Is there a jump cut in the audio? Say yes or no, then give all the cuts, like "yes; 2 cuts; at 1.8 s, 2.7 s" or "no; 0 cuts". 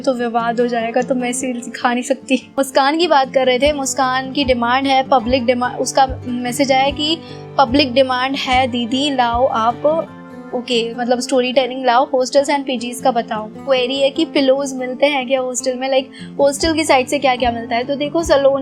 yes; 2 cuts; at 2.5 s, 13.6 s